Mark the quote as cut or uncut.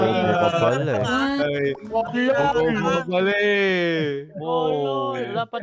uncut